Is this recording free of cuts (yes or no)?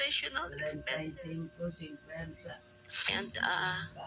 no